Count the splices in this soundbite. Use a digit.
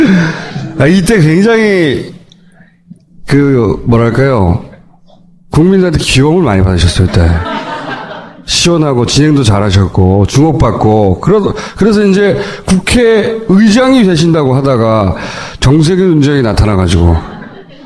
1